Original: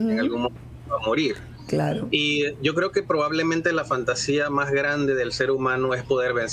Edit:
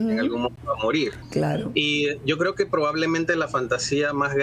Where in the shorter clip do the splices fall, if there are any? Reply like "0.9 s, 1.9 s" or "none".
1.0 s